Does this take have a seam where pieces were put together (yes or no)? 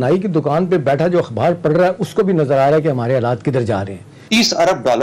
yes